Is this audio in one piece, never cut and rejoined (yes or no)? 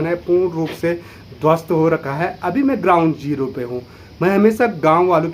yes